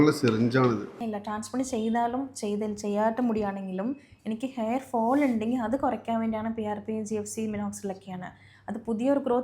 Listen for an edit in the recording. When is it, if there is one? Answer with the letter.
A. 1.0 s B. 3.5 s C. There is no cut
A